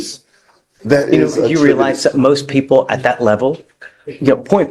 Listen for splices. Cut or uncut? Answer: uncut